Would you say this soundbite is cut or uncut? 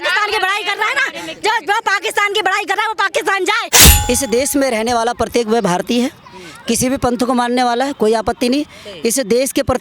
cut